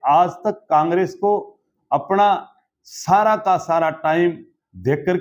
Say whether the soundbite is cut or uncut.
uncut